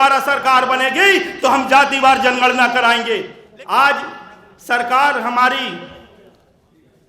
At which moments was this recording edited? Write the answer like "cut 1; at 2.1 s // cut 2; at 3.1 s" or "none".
cut 1; at 3.4 s